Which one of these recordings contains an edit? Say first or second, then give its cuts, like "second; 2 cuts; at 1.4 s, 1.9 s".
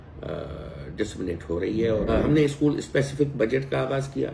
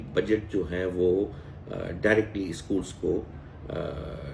first; 1 cut; at 2.1 s